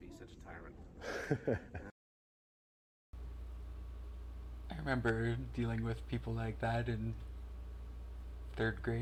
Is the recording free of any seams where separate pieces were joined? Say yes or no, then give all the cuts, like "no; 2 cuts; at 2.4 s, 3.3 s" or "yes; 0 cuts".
yes; 0 cuts